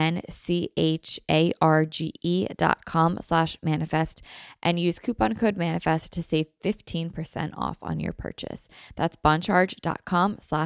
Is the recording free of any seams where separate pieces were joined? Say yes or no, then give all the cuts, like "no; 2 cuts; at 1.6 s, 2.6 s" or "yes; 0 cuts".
yes; 0 cuts